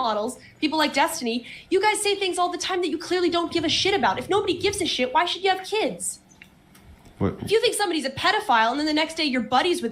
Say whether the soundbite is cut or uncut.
uncut